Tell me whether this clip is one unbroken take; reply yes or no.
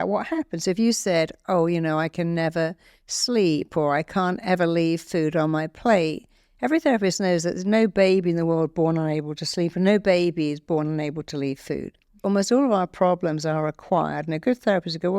no